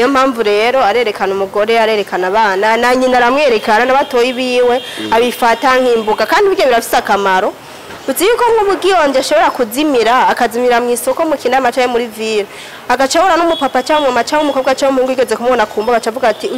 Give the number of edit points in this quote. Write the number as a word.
zero